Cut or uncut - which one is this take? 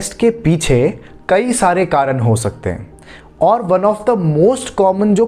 uncut